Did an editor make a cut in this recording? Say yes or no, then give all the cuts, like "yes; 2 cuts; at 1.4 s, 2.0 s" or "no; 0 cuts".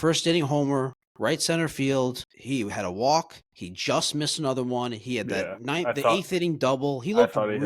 yes; 2 cuts; at 1.0 s, 2.3 s